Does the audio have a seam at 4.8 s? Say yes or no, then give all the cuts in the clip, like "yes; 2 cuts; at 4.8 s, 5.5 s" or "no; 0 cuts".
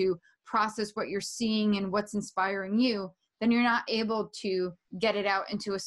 yes; 1 cut; at 4.8 s